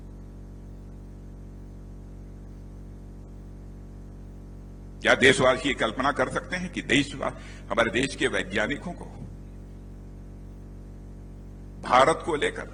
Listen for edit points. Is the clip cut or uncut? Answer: uncut